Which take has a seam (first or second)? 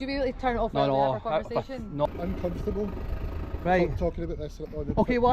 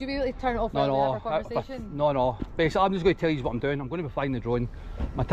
first